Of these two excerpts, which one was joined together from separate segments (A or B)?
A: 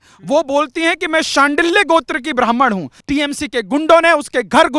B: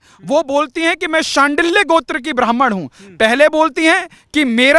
A